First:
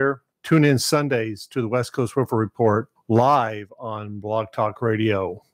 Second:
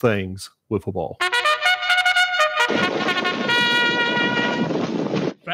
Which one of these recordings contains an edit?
second; 1 cut; at 1.0 s

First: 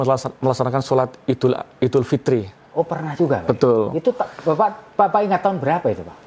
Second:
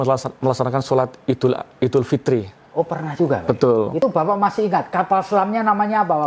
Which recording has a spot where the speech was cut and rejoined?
second; 1 cut; at 4.0 s

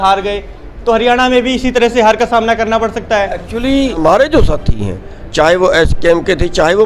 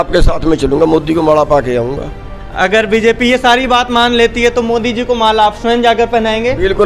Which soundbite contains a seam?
first; 1 cut; at 4.0 s

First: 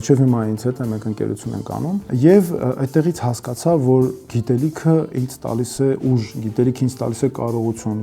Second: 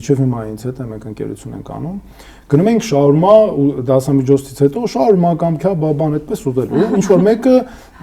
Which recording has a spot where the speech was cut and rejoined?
first; 1 cut; at 2.1 s

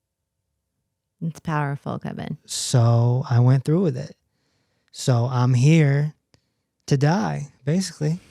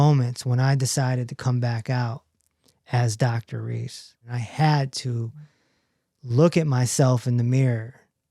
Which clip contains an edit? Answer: second; 1 cut; at 4.4 s

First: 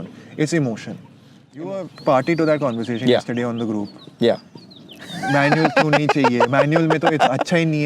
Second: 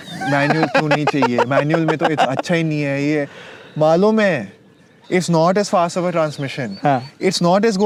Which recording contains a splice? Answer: first; 1 cut; at 1.6 s

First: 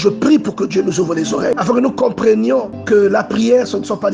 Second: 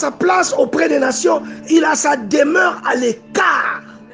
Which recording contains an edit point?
first; 2 cuts; at 1.5 s, 2.7 s

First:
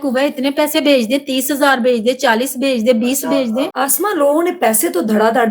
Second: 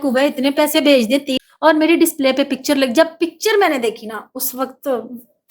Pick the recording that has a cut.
second; 1 cut; at 1.3 s

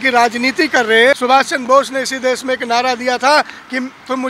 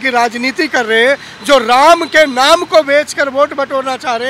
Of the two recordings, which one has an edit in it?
first; 1 cut; at 1.2 s

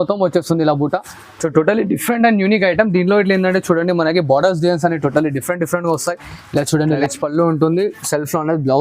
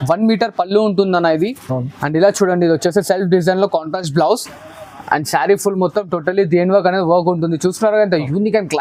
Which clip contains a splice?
first; 1 cut; at 7.0 s

